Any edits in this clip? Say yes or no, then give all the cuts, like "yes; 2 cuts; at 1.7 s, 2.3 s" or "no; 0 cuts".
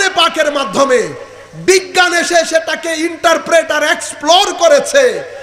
no; 0 cuts